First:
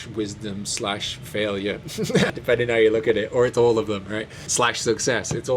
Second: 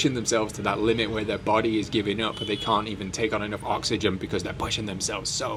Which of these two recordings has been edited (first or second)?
first